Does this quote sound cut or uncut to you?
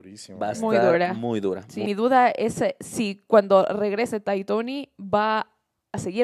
cut